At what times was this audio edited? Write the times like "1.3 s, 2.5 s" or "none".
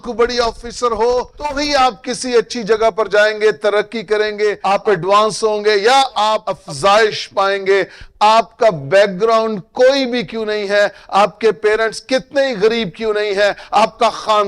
1.6 s, 4.6 s, 6.5 s